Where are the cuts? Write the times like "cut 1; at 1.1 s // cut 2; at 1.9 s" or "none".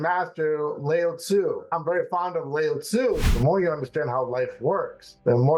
cut 1; at 1.7 s // cut 2; at 3.2 s

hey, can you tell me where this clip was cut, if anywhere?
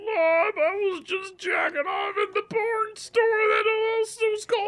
none

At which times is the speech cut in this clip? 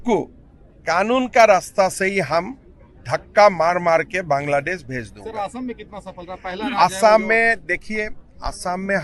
none

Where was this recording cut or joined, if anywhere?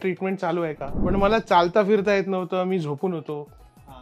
cut 1; at 1.0 s

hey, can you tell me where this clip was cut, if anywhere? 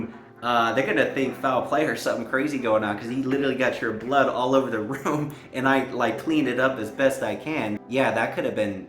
cut 1; at 7.8 s

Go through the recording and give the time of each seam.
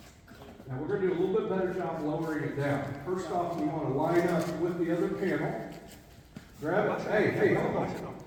none

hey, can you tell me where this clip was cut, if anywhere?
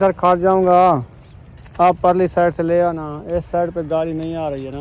none

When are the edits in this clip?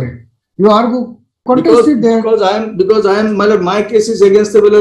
cut 1; at 1.4 s

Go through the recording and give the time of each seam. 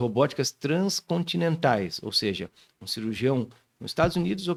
none

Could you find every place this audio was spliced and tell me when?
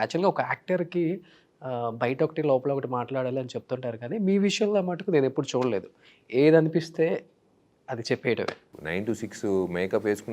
cut 1; at 8.7 s

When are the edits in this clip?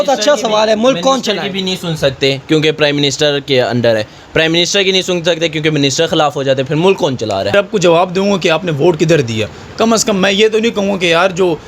cut 1; at 7.5 s

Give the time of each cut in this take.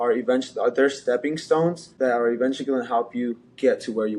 cut 1; at 1.9 s

